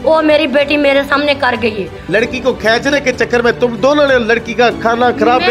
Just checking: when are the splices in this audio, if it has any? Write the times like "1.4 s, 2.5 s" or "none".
2.1 s